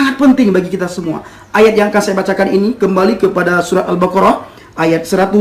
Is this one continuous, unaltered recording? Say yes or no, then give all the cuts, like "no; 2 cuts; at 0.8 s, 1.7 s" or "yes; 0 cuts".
yes; 0 cuts